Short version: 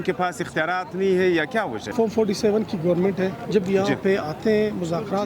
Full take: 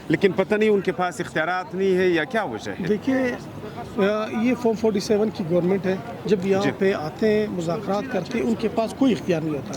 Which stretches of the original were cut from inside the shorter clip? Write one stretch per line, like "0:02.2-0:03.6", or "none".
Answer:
0:02.7-0:04.6
0:06.1-0:06.2